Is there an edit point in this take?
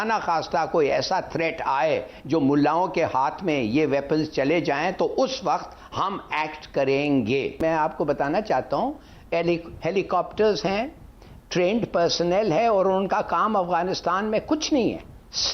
yes; 1 cut; at 7.6 s

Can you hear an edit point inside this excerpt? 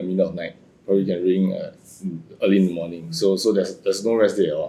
no; 0 cuts

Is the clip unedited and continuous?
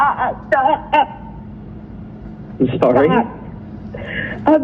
yes; 0 cuts

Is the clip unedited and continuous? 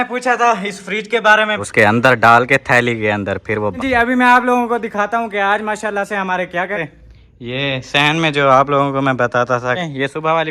no; 4 cuts; at 1.6 s, 3.8 s, 6.8 s, 9.8 s

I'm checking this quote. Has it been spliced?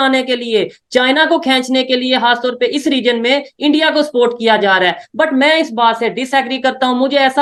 no; 0 cuts

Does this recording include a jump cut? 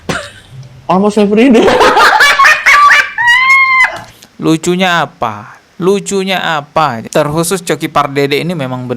yes; 1 cut; at 7.0 s

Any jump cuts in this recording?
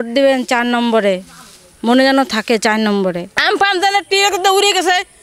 yes; 1 cut; at 3.3 s

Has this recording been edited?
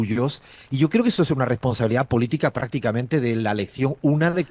no; 0 cuts

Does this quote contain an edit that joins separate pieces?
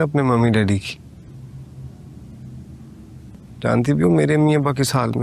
no; 0 cuts

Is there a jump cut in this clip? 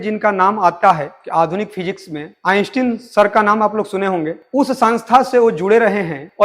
no; 0 cuts

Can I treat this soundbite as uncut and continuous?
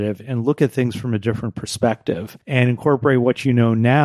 no; 1 cut; at 2.3 s

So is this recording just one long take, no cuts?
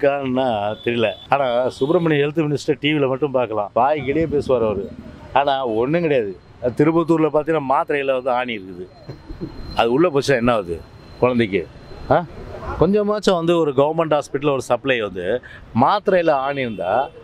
no; 2 cuts; at 1.2 s, 3.7 s

